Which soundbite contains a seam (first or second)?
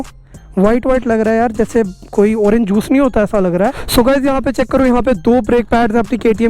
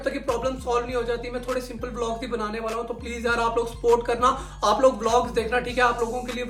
first